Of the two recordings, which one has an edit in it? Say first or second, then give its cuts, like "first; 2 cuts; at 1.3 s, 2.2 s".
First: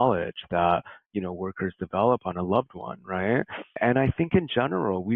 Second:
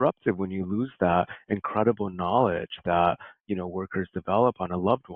first; 1 cut; at 3.7 s